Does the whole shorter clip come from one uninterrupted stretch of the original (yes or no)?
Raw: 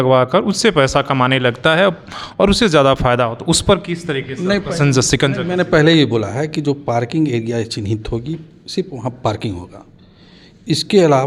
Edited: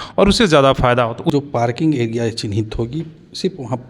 no